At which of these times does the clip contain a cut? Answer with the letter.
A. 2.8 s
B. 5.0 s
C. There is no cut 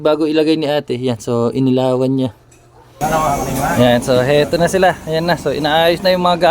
A